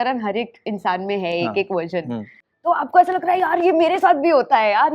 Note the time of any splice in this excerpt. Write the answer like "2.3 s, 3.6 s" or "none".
2.4 s